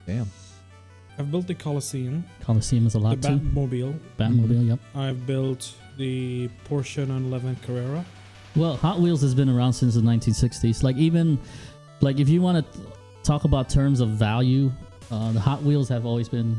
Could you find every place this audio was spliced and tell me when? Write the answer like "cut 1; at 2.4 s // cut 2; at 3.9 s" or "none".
cut 1; at 8.3 s